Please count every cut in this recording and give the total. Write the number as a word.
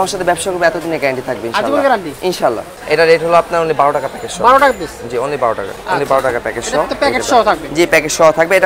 one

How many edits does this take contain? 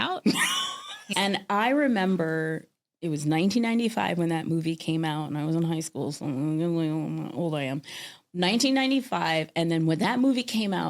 one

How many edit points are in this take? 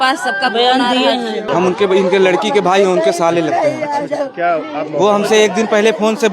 one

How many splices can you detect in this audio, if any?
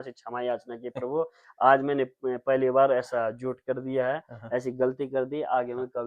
zero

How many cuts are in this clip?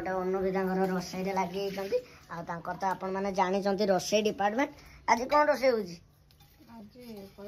zero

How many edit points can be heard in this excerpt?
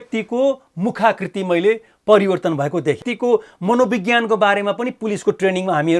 one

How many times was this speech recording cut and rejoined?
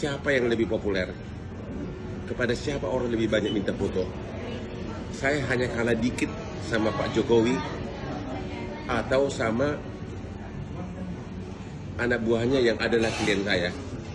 zero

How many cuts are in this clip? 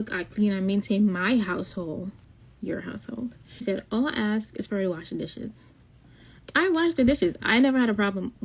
zero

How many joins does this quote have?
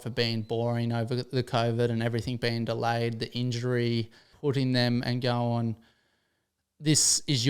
one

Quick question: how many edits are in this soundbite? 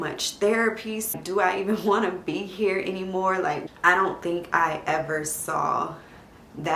two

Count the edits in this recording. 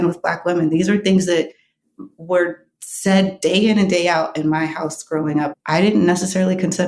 one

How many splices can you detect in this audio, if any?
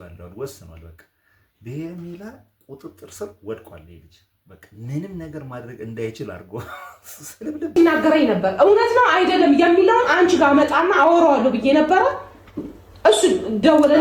one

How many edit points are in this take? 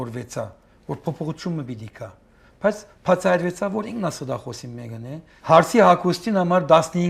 one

